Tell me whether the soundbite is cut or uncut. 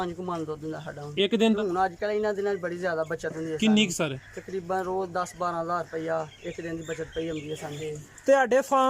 cut